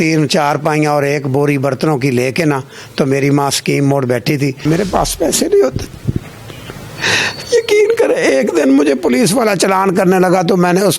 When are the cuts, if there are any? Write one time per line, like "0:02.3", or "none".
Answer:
0:04.6